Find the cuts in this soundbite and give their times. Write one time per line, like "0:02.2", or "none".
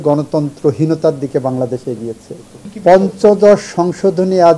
0:02.6